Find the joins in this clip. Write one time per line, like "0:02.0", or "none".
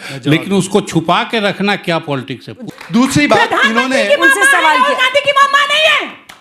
0:02.5